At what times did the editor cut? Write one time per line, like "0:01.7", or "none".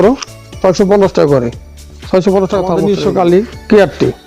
0:02.8